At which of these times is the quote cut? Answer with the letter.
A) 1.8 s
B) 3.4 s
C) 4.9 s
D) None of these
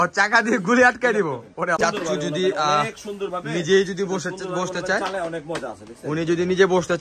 A